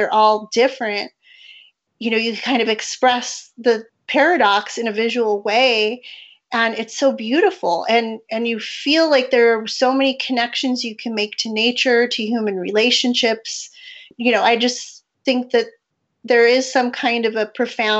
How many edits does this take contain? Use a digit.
2